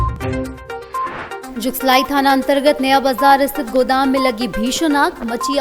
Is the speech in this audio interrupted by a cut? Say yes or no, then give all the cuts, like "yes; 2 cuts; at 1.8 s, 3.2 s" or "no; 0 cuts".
yes; 1 cut; at 1.4 s